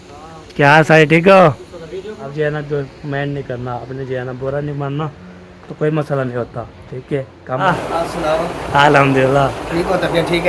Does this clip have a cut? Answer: yes; 2 cuts; at 2.3 s, 7.6 s

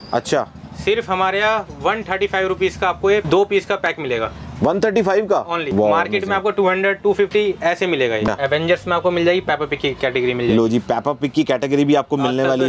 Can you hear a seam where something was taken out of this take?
yes; 3 cuts; at 3.2 s, 5.6 s, 8.3 s

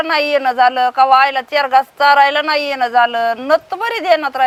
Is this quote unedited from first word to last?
yes; 0 cuts

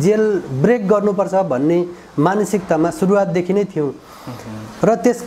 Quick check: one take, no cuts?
yes; 0 cuts

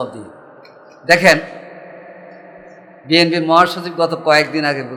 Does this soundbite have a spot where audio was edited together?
no; 0 cuts

